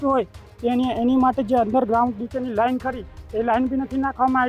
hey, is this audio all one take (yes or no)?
yes